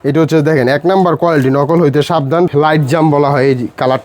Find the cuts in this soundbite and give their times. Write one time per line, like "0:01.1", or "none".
0:02.5